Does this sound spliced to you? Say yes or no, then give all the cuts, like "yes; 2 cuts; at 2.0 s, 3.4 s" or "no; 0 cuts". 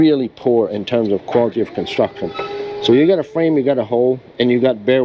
no; 0 cuts